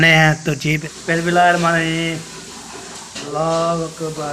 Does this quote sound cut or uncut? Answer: cut